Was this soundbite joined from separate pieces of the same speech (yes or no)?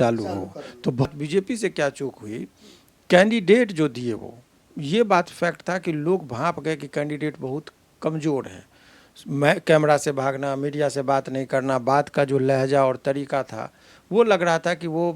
yes